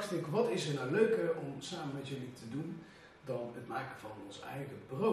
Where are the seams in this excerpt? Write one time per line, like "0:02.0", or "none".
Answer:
none